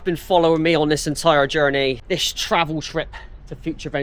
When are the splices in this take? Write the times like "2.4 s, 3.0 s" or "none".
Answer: 2.0 s

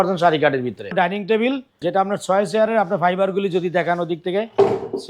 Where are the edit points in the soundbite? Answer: 0.9 s, 1.7 s

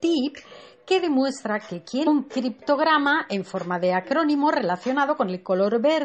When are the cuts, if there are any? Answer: none

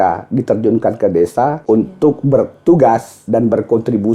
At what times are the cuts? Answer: 1.6 s, 3.1 s

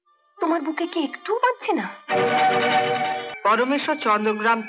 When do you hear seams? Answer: 3.3 s

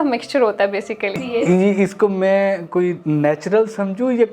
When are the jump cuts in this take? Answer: 1.2 s

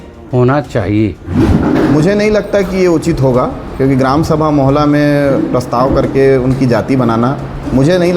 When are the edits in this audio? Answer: 1.4 s

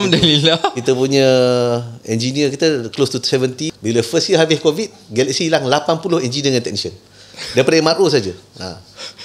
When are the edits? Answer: 3.7 s

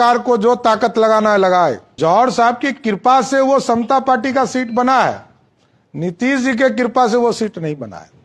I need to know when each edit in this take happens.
1.9 s

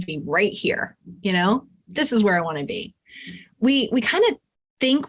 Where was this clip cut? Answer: none

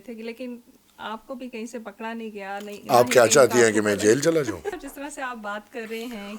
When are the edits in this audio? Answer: 4.8 s

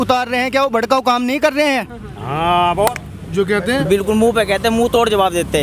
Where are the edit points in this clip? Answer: 3.0 s

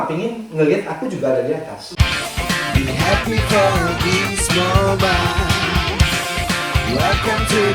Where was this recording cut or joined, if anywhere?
1.8 s

